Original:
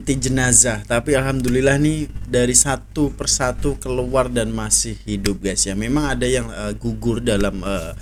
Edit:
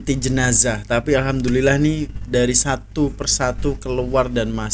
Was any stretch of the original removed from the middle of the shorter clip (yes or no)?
no